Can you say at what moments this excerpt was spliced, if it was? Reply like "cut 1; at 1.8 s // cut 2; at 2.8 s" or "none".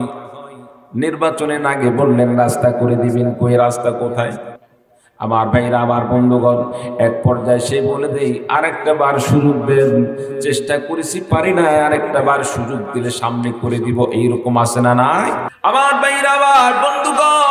cut 1; at 15.5 s